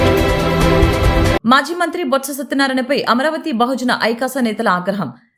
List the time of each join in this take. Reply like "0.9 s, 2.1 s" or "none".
none